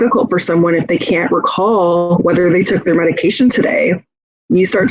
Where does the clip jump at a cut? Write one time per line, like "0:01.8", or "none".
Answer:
none